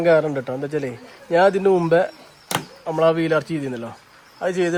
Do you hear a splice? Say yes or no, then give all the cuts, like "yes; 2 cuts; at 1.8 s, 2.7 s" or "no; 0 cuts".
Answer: no; 0 cuts